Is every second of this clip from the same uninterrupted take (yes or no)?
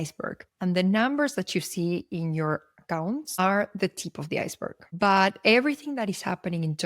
yes